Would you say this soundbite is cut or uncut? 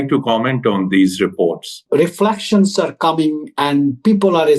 cut